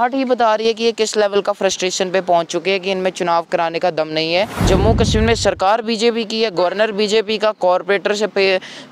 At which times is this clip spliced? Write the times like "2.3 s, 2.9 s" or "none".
4.6 s